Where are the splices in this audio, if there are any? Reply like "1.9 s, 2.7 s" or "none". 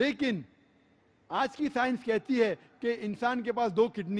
2.1 s